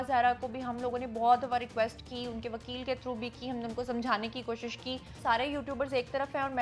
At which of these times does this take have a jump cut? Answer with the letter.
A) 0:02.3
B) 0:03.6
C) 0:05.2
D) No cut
C